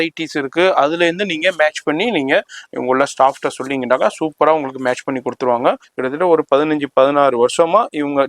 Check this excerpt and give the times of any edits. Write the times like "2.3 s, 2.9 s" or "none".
5.9 s